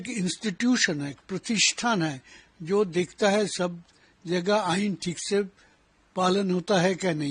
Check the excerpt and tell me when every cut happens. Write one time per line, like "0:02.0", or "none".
none